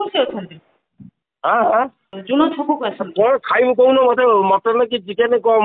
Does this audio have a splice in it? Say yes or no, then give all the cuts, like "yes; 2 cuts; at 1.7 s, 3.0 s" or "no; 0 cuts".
yes; 1 cut; at 2.1 s